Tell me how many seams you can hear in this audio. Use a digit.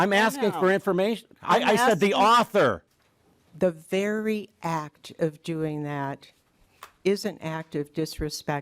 1